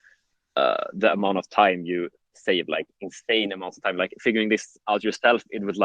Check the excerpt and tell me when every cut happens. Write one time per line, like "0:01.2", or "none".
none